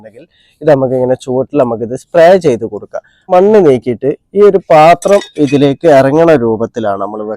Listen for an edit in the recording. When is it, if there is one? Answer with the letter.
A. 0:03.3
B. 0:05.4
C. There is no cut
A